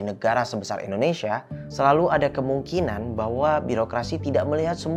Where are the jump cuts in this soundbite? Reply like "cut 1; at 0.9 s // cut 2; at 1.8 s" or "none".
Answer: none